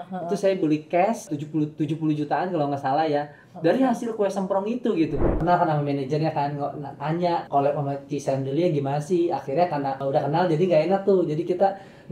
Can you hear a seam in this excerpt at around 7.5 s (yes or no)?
yes